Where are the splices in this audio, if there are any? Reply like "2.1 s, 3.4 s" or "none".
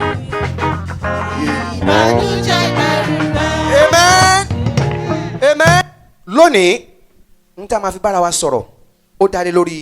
5.8 s